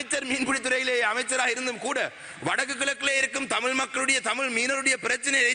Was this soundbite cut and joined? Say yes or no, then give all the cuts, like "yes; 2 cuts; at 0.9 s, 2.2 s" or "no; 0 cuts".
no; 0 cuts